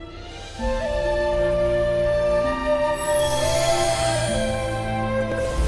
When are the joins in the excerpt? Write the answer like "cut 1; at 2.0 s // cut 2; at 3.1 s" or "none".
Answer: none